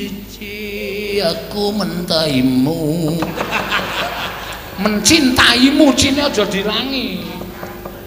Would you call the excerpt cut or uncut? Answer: uncut